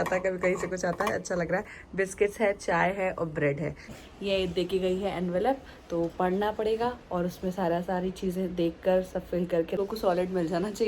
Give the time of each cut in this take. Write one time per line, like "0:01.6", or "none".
0:03.9
0:09.8

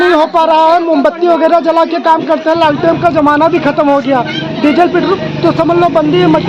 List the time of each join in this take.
none

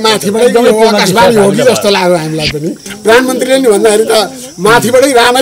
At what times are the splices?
0:02.9

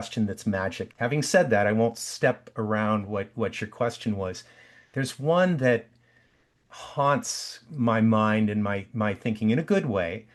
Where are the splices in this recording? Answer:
none

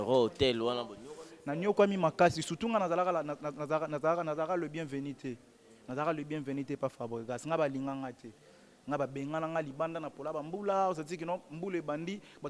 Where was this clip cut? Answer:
none

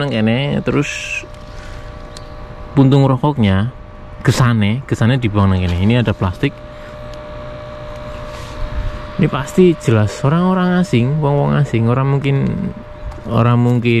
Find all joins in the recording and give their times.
none

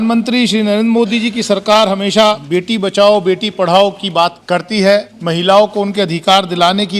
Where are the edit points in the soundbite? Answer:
0:02.4
0:04.4
0:05.1

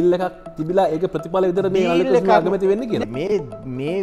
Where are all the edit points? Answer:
0:03.0

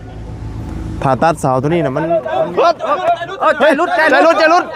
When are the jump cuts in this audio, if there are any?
0:02.0

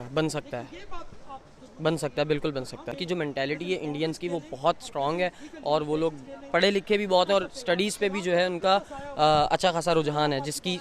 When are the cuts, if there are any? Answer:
0:02.9

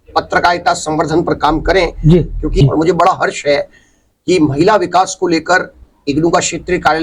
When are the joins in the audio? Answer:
0:02.6

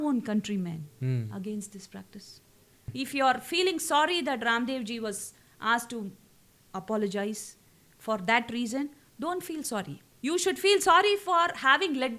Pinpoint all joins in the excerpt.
0:02.9
0:10.0

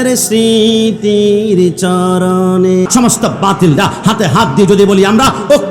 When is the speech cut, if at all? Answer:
0:02.9

